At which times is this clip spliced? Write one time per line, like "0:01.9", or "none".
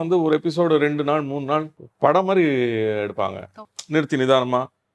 0:01.8
0:03.7